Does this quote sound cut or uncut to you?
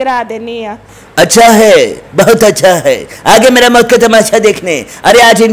cut